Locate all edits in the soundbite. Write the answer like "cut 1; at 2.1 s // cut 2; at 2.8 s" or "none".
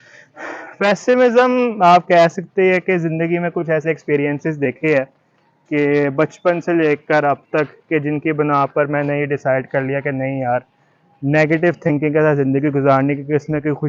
none